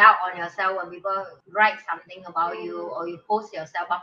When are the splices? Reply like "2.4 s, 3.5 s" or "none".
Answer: 1.3 s